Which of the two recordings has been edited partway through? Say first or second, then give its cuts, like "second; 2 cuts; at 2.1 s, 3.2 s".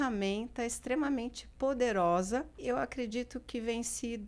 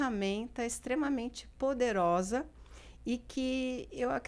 first; 1 cut; at 2.5 s